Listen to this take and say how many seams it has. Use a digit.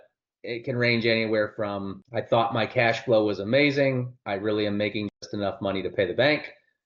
1